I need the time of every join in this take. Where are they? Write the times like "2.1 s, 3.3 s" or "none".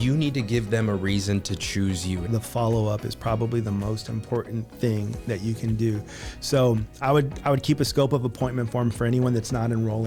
2.2 s